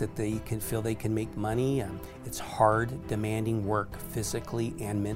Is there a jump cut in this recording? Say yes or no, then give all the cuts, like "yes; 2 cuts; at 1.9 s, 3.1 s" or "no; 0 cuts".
no; 0 cuts